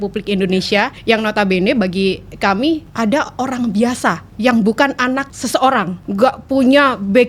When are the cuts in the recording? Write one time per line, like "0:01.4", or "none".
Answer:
0:00.9
0:02.9
0:04.3
0:05.3
0:06.0